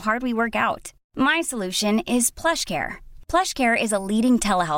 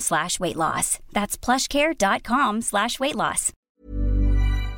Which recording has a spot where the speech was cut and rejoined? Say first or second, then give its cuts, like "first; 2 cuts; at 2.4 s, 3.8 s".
second; 1 cut; at 3.5 s